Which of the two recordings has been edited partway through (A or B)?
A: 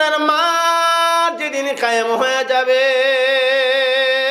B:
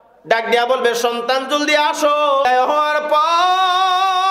B